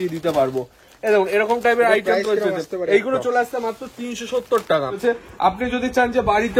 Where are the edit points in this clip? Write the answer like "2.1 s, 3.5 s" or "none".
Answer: 5.0 s